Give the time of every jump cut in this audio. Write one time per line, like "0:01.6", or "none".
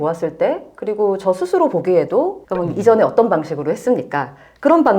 0:02.4